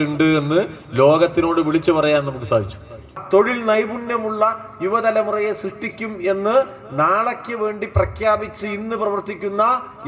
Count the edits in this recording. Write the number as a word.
one